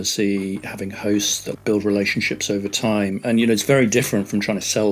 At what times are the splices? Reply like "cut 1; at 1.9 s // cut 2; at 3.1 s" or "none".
cut 1; at 1.6 s